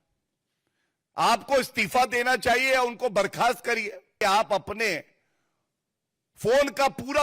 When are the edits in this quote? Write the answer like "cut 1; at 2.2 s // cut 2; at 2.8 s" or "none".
cut 1; at 4.1 s

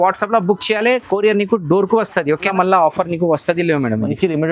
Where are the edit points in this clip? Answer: cut 1; at 2.5 s

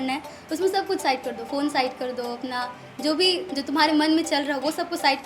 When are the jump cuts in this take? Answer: none

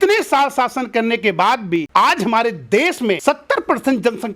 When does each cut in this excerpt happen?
cut 1; at 1.9 s // cut 2; at 3.2 s

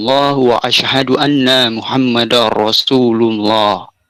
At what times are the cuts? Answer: none

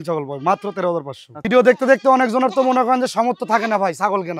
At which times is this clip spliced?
cut 1; at 1.5 s

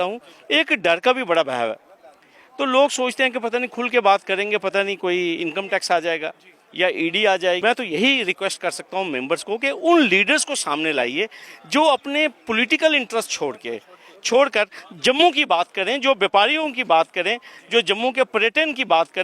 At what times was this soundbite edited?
cut 1; at 7.6 s

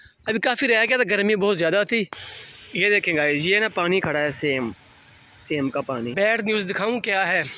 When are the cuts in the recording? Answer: cut 1; at 2.7 s // cut 2; at 6.1 s

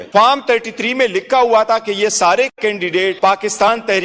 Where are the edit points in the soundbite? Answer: none

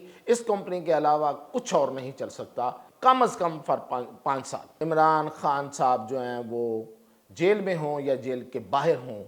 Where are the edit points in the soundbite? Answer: cut 1; at 2.9 s // cut 2; at 4.6 s

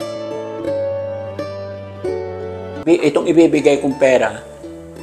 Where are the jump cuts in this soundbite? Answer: cut 1; at 2.8 s

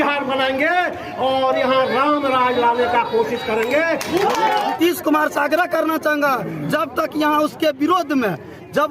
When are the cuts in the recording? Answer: cut 1; at 4.7 s

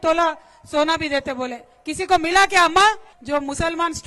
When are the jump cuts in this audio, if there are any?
cut 1; at 3.1 s

